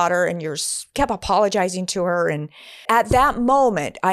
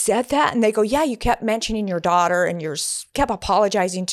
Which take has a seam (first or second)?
first